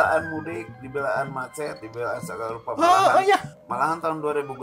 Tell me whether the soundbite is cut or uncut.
uncut